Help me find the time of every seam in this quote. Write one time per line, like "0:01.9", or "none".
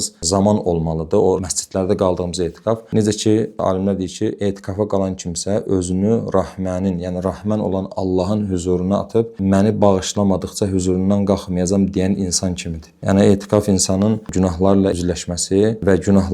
none